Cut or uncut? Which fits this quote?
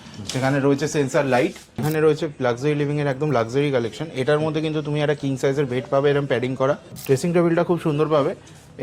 cut